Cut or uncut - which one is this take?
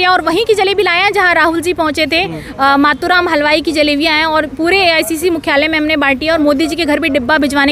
uncut